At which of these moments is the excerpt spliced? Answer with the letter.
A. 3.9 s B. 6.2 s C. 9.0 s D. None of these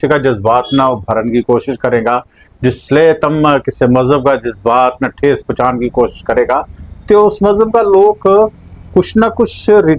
D